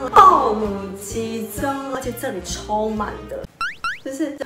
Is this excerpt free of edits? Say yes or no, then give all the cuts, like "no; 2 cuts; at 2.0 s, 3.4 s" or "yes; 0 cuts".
no; 1 cut; at 3.5 s